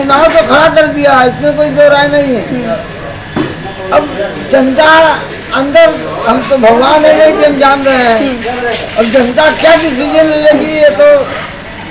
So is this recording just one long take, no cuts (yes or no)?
yes